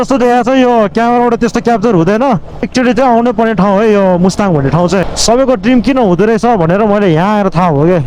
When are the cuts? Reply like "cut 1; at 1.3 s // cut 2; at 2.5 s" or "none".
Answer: cut 1; at 2.7 s // cut 2; at 5.0 s

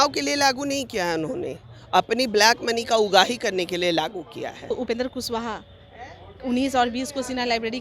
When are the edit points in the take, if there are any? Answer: cut 1; at 4.7 s

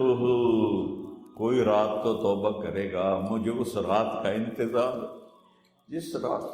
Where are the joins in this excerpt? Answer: none

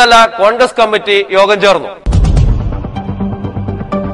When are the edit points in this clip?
cut 1; at 2.0 s

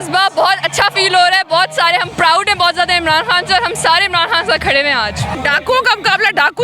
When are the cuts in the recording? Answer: cut 1; at 5.3 s

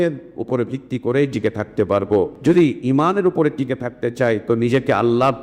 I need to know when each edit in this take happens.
cut 1; at 2.3 s

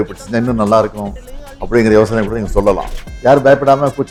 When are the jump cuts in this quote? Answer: none

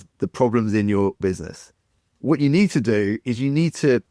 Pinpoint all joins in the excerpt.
cut 1; at 1.2 s

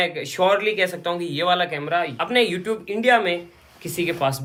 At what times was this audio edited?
none

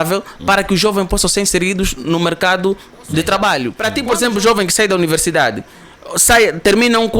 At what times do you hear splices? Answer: cut 1; at 3.8 s

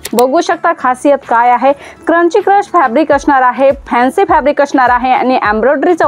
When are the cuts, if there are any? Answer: none

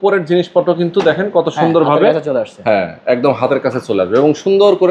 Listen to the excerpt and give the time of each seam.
none

